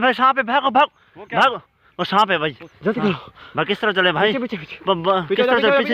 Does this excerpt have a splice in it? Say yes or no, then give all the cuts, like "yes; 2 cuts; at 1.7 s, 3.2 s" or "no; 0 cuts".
yes; 1 cut; at 2.6 s